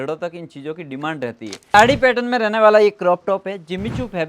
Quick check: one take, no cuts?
no; 1 cut; at 1.7 s

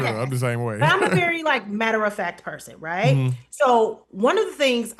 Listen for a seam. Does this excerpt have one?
no; 0 cuts

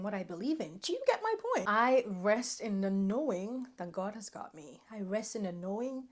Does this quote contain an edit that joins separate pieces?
yes; 1 cut; at 1.7 s

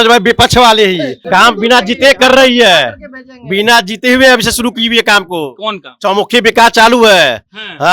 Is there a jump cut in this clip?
yes; 1 cut; at 1.2 s

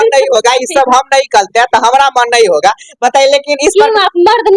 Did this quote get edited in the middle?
no; 0 cuts

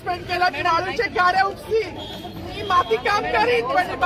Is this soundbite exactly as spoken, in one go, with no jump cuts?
yes; 0 cuts

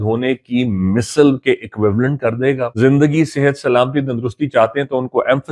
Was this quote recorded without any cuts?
no; 1 cut; at 2.7 s

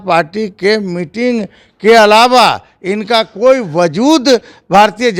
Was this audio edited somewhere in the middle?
no; 0 cuts

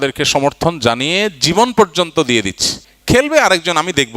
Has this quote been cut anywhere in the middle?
yes; 1 cut; at 2.7 s

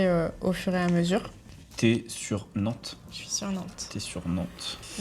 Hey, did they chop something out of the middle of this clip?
yes; 1 cut; at 1.5 s

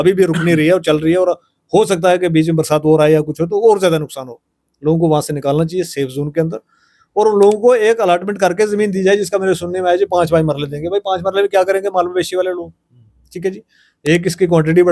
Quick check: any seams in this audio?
no; 0 cuts

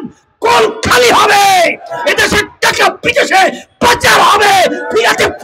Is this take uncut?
yes; 0 cuts

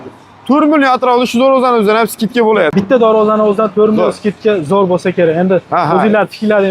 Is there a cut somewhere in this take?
yes; 1 cut; at 2.7 s

